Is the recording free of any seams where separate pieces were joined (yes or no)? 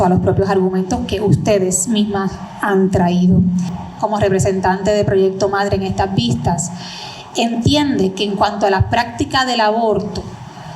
no